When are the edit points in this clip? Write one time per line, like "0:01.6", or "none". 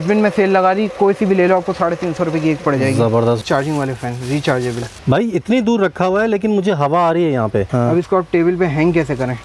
0:03.4
0:04.9
0:07.7